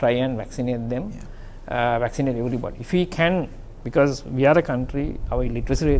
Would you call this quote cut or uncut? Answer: uncut